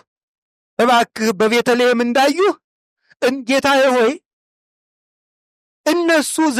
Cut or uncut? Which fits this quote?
uncut